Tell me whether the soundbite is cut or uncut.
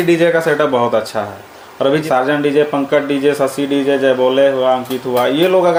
uncut